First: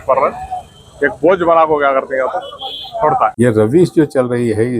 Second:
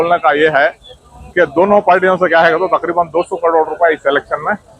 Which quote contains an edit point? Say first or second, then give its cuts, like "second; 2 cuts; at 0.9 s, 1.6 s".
first; 1 cut; at 3.3 s